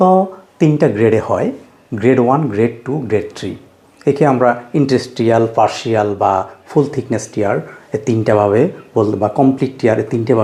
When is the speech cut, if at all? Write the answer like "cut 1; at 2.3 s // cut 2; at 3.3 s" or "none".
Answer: none